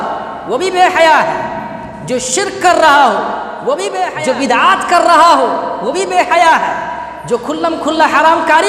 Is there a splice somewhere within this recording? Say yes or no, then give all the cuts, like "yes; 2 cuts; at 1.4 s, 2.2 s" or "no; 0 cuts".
yes; 1 cut; at 4.1 s